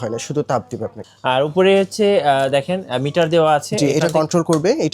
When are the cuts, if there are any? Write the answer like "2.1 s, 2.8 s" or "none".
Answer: 1.0 s